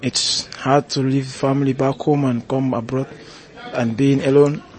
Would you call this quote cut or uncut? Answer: uncut